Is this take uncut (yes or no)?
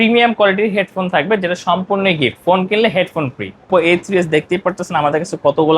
no